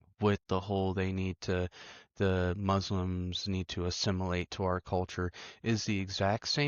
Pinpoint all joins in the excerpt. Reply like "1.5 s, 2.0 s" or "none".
none